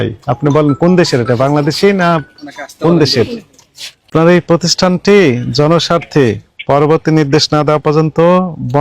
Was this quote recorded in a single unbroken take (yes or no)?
no